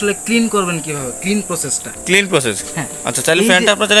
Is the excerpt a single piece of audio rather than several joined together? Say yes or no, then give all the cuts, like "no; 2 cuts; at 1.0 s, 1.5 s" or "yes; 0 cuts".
yes; 0 cuts